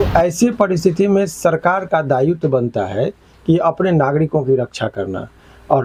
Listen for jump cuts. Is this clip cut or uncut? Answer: uncut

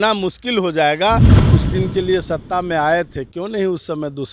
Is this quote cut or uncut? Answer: cut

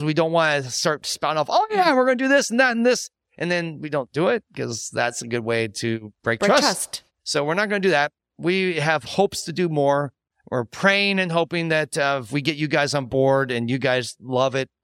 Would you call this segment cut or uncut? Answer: uncut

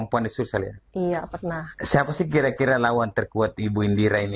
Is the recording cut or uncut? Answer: cut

